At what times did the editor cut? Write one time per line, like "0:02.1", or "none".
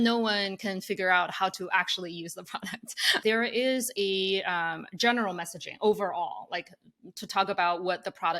0:03.2